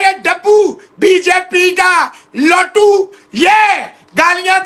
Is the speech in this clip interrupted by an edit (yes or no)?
no